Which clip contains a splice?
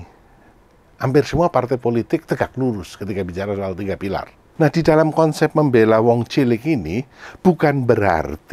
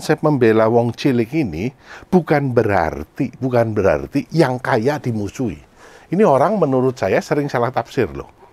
first; 1 cut; at 4.4 s

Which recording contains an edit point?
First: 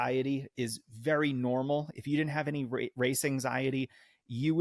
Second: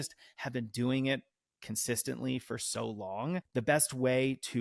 second; 1 cut; at 3.5 s

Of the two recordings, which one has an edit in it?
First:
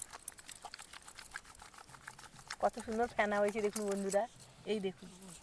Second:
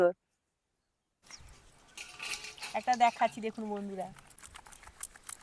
second; 2 cuts; at 1.2 s, 4.4 s

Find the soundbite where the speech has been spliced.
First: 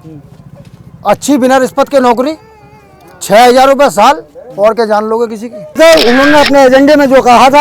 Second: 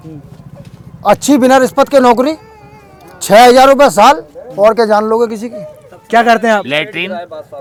first; 1 cut; at 5.8 s

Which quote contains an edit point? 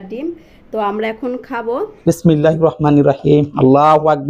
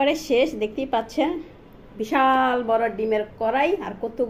first; 1 cut; at 2.0 s

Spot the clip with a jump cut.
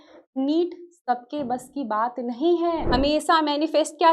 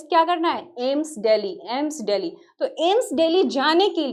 first; 1 cut; at 2.8 s

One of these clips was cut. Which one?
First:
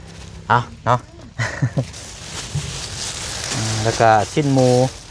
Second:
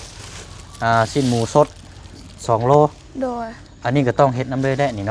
first; 1 cut; at 1.9 s

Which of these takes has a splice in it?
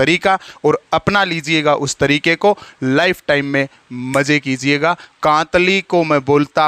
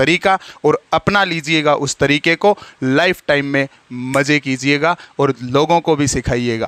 first; 1 cut; at 5.1 s

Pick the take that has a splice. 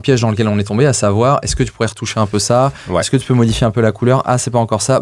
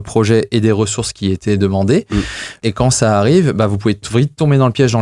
second; 1 cut; at 2.6 s

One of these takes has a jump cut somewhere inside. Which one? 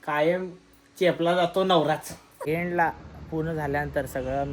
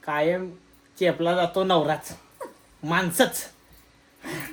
first; 1 cut; at 2.3 s

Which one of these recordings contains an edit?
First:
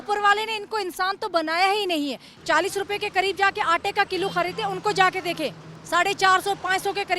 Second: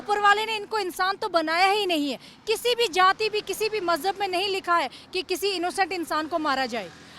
first; 1 cut; at 2.4 s

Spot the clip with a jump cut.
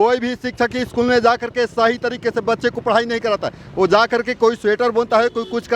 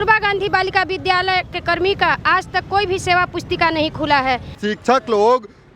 second; 1 cut; at 4.6 s

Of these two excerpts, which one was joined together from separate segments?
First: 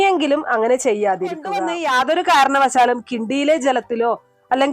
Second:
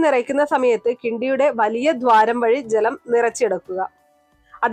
first; 1 cut; at 1.7 s

